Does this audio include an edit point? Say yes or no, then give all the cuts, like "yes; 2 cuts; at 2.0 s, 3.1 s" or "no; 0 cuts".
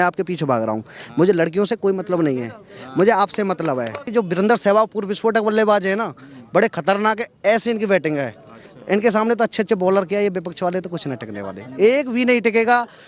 yes; 1 cut; at 4.1 s